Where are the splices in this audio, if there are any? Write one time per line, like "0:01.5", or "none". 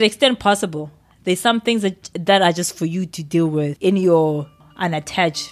0:03.7
0:04.6

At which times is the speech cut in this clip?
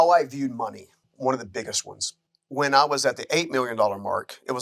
0:01.0
0:02.2

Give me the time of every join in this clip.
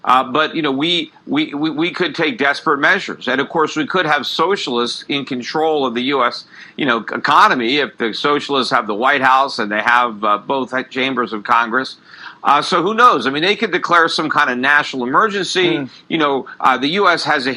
none

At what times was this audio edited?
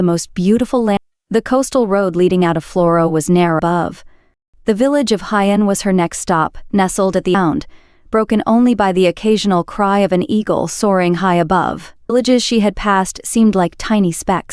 0:01.0
0:03.6
0:07.3
0:12.1

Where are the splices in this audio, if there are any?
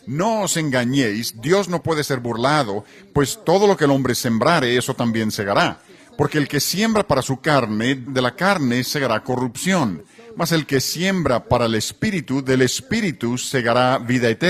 none

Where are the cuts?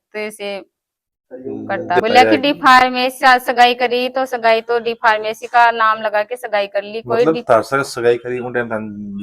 none

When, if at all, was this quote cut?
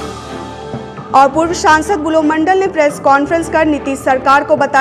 0:01.0

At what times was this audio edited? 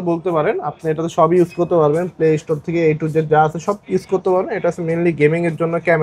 none

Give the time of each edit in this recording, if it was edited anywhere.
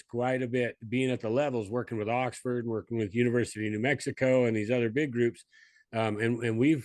none

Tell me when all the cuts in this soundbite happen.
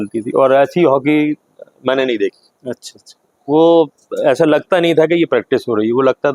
none

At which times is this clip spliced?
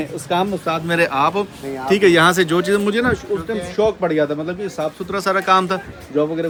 none

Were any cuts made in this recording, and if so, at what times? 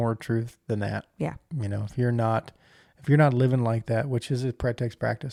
none

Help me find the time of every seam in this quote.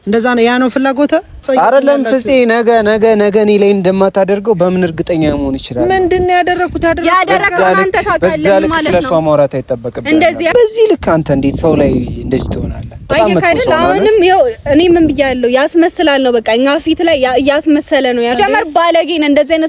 0:01.4
0:10.5
0:18.4

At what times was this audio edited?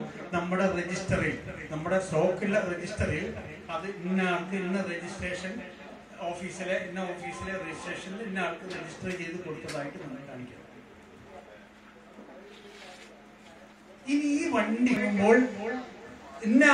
0:15.0

